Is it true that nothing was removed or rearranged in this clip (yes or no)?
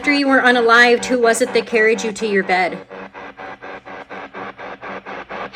yes